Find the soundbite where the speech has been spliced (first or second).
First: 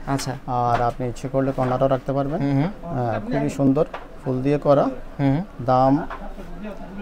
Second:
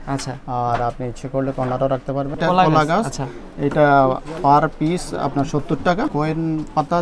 second